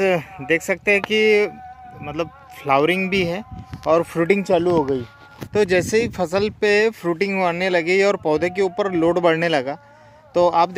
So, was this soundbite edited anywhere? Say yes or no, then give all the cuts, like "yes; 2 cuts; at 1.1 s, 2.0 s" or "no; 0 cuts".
no; 0 cuts